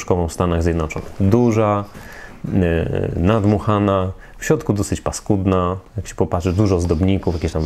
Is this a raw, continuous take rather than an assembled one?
yes; 0 cuts

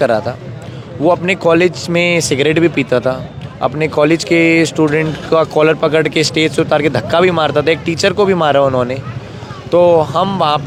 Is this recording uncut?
yes; 0 cuts

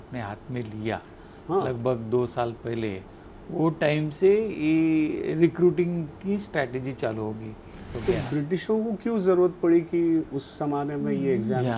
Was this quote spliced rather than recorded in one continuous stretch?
yes; 1 cut; at 7.9 s

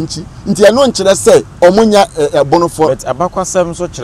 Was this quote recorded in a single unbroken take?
no; 1 cut; at 1.5 s

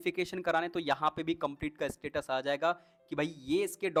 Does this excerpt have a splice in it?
no; 0 cuts

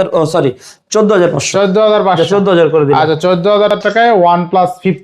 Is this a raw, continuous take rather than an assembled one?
no; 1 cut; at 3.8 s

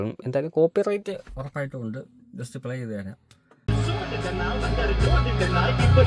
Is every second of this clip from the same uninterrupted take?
yes; 0 cuts

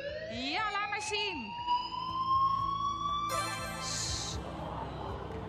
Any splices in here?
yes; 1 cut; at 4.5 s

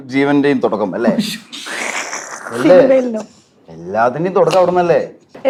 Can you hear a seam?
no; 0 cuts

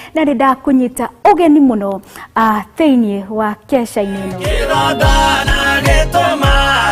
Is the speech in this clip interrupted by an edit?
yes; 1 cut; at 5.2 s

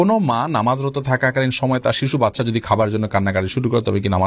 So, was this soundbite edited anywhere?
no; 0 cuts

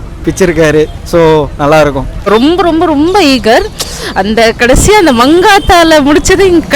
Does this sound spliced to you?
yes; 1 cut; at 2.3 s

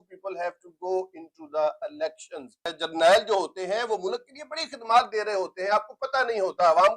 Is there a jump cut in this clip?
yes; 1 cut; at 2.8 s

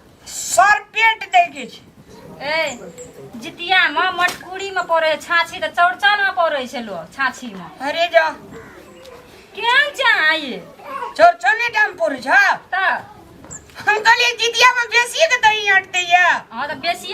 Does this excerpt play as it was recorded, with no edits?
yes; 0 cuts

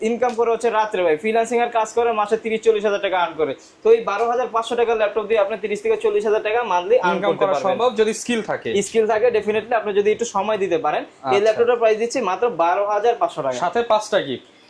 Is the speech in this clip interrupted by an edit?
no; 0 cuts

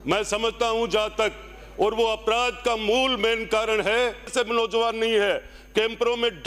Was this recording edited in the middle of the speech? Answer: yes; 1 cut; at 4.3 s

